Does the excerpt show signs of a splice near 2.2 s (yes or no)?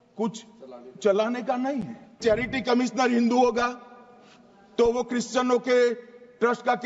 yes